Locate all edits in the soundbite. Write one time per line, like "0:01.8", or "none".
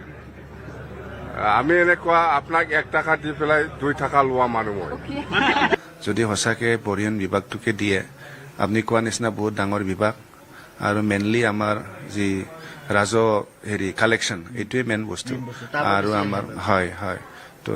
0:05.8